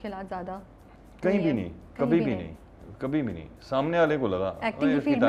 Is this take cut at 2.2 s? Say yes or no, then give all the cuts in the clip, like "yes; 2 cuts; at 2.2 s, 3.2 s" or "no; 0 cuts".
no; 0 cuts